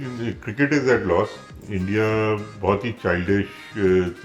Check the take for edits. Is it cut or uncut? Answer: uncut